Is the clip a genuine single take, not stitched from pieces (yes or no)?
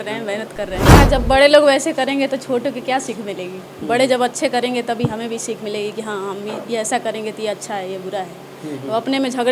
no